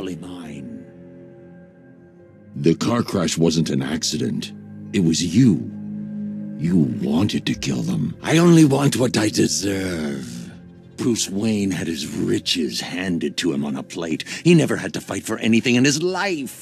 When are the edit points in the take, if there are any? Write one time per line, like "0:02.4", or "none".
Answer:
0:00.8
0:02.6